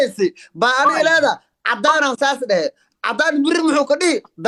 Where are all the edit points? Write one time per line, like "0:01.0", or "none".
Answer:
none